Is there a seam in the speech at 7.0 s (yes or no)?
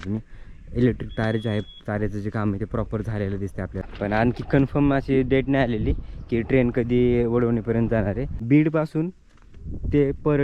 no